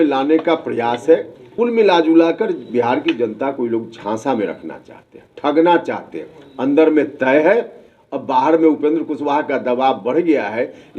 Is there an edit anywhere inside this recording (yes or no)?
yes